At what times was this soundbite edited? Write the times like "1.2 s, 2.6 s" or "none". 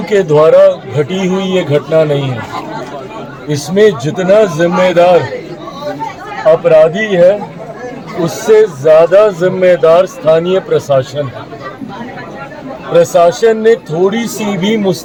none